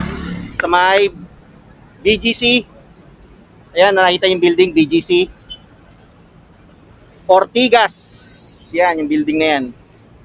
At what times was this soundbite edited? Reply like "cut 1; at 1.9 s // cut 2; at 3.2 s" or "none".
none